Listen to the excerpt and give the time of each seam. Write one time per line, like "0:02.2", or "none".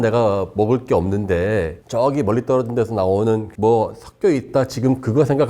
none